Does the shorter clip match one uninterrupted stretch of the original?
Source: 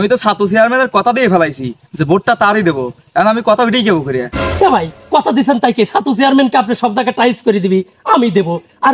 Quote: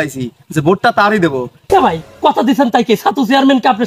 no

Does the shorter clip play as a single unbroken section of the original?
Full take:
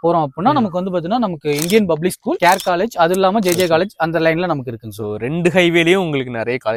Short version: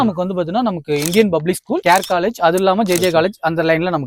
yes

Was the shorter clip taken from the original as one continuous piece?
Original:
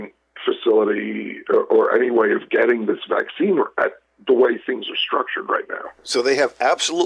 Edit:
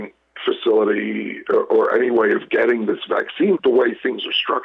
no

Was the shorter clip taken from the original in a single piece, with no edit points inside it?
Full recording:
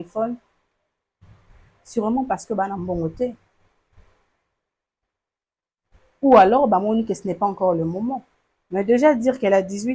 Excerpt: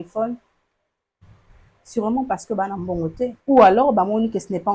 no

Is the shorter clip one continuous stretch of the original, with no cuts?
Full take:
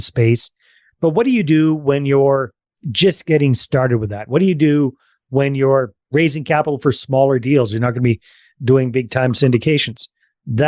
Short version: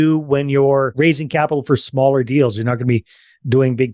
no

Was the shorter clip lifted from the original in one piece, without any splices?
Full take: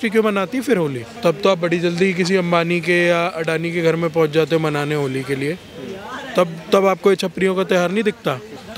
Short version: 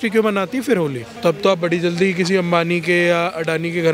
yes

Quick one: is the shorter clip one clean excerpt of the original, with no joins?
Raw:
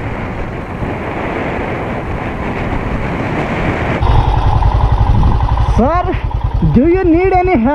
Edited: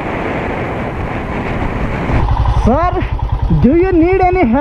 no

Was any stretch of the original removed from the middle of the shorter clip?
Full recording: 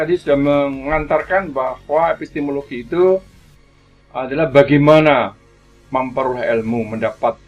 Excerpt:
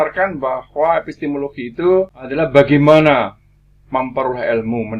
yes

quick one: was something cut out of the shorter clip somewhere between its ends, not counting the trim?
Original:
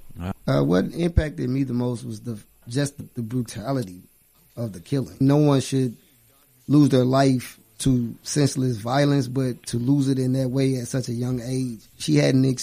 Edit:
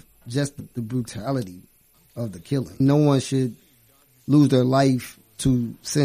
no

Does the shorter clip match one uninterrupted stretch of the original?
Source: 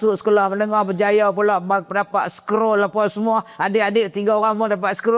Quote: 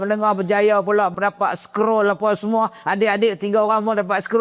no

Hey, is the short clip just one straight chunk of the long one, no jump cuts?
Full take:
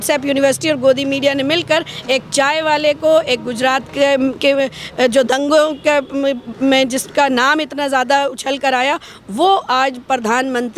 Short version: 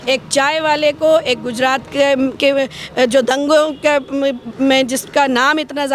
yes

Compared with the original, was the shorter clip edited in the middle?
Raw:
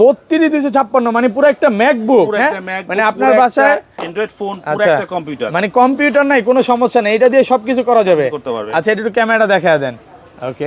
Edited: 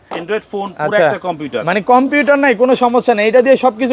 no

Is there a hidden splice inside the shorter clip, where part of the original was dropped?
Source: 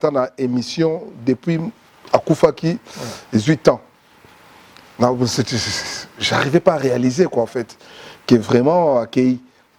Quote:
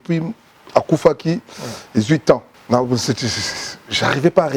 yes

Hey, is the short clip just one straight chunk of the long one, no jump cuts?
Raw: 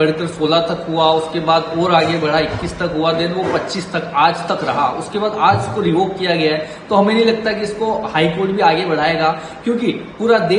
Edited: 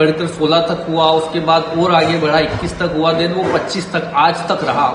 yes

